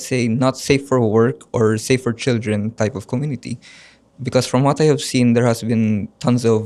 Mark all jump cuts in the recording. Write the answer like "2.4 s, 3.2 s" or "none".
none

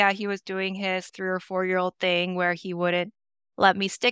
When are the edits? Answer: 1.1 s

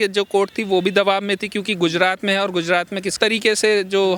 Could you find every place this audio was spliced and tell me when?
3.1 s

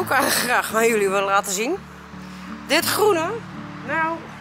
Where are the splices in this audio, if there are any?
none

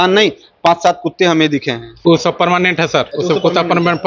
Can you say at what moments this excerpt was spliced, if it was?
3.1 s

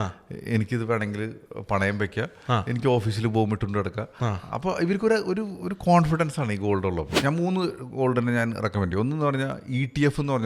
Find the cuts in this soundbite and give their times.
7.2 s

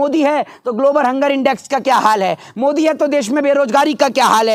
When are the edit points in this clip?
none

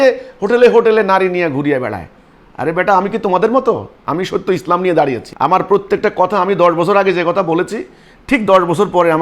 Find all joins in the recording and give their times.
4.0 s, 5.3 s

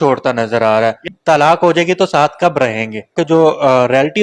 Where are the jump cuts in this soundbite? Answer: 1.0 s, 3.1 s

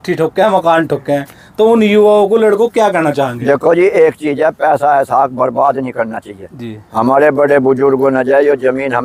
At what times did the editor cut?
none

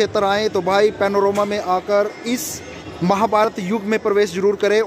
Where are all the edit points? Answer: none

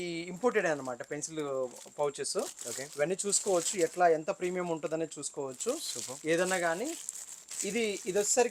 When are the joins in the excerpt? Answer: none

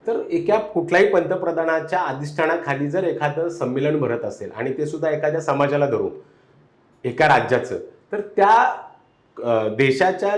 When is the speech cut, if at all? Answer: none

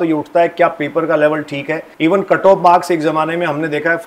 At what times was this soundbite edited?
1.8 s

